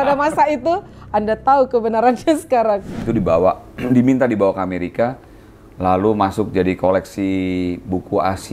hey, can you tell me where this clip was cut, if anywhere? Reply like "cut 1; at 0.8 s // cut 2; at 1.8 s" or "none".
cut 1; at 3.1 s